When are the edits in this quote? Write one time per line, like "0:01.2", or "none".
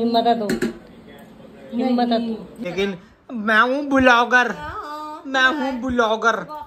0:02.6